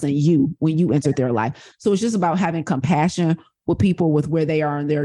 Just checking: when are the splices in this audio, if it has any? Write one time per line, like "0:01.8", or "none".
0:01.6